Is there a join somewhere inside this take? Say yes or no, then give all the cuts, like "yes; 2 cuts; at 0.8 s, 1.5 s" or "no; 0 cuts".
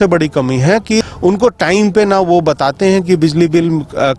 yes; 1 cut; at 1.0 s